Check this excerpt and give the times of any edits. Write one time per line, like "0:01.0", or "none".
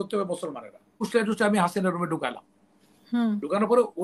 0:01.0